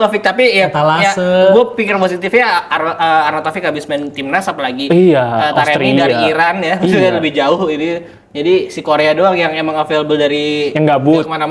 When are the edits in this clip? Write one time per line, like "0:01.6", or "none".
none